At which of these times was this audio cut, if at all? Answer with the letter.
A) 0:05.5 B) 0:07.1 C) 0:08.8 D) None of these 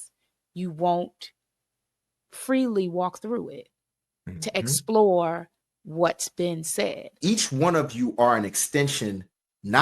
B